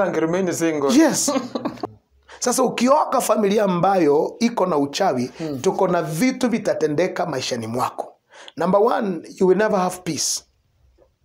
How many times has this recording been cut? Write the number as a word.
one